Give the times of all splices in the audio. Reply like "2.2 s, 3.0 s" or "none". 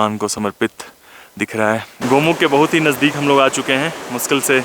1.9 s